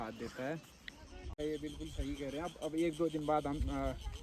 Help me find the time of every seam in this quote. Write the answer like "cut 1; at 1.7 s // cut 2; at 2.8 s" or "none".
cut 1; at 1.3 s